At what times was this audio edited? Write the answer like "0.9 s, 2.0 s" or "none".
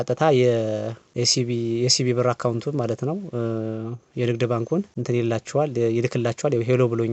1.0 s, 4.9 s